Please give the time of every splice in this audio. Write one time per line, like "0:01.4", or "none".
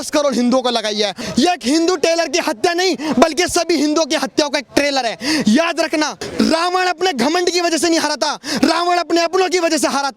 0:01.1
0:06.2